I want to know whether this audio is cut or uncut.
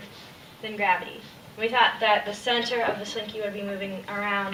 uncut